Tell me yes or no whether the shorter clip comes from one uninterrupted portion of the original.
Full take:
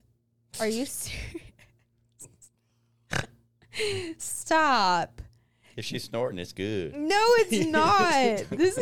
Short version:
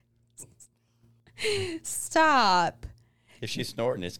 no